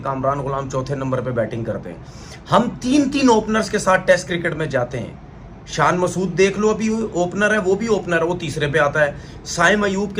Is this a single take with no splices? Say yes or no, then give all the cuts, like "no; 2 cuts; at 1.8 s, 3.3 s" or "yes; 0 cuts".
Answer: yes; 0 cuts